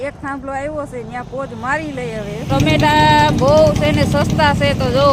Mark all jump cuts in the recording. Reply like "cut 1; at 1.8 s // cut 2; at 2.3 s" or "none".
cut 1; at 2.5 s